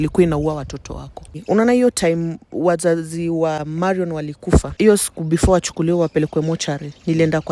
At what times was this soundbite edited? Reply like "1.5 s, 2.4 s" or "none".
1.4 s, 3.6 s, 4.7 s

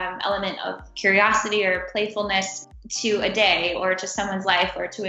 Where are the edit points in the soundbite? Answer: none

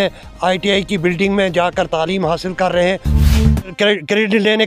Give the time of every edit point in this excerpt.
3.3 s

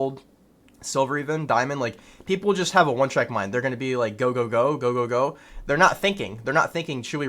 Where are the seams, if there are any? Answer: none

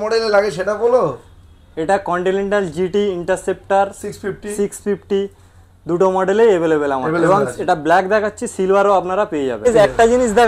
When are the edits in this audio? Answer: 7.2 s, 9.7 s

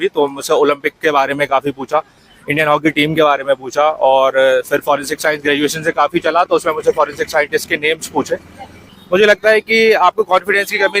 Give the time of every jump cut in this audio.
8.8 s

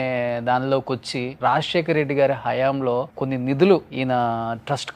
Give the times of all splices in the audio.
1.3 s, 3.1 s, 3.9 s

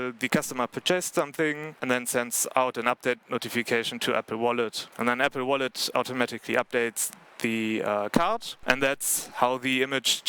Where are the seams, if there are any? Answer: 1.8 s, 4.8 s, 8.5 s

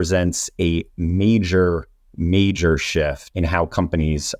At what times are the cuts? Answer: 3.2 s

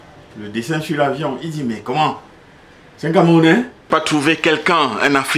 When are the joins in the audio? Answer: 3.9 s

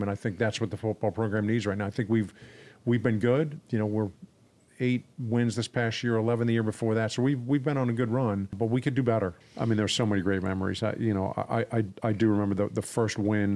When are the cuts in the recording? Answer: 3.6 s, 8.5 s, 9.4 s

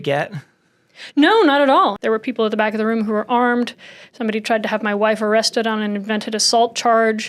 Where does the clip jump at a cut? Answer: 2.0 s

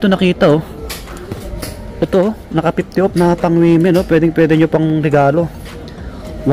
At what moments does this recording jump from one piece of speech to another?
none

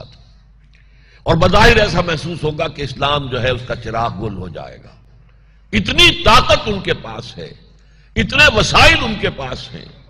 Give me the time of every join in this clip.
none

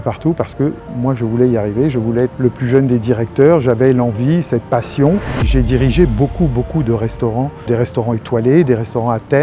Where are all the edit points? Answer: 2.3 s, 5.4 s, 7.6 s

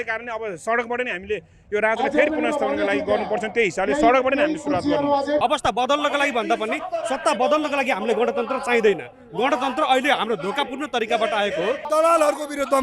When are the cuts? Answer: 5.4 s, 11.8 s

